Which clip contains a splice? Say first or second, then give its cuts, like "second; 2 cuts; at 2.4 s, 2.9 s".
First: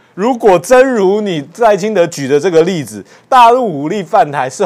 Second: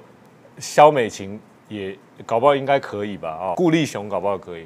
second; 1 cut; at 3.5 s